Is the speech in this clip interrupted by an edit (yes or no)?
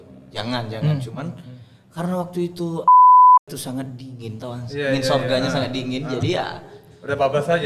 no